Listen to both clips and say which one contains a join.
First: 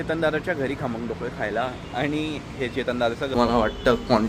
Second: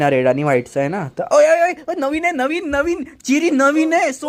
first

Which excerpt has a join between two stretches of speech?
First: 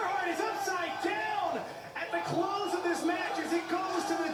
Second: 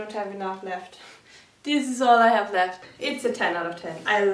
second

